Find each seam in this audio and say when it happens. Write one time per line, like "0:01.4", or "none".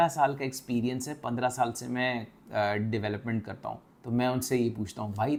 none